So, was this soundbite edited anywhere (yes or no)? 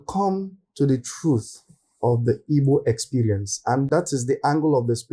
no